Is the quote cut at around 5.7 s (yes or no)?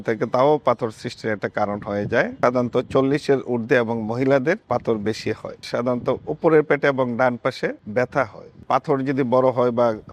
yes